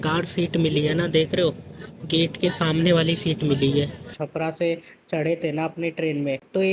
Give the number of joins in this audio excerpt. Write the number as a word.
one